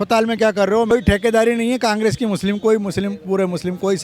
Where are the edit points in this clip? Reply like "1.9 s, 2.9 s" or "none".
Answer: 0.9 s